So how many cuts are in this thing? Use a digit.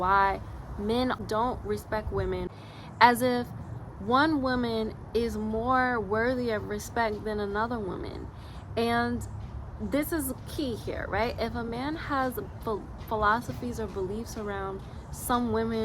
2